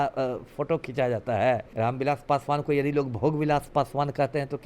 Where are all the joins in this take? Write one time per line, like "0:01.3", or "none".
0:01.7